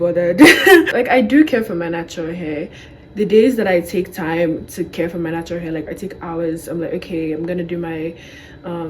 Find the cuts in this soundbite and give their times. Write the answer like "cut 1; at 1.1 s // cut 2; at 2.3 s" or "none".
cut 1; at 0.9 s